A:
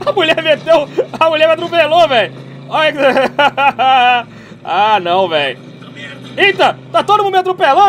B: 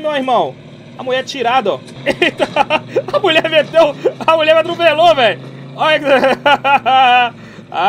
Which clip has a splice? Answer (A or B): B